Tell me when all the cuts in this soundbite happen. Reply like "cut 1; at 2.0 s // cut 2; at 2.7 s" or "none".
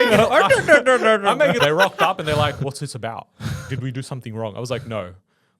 cut 1; at 1.6 s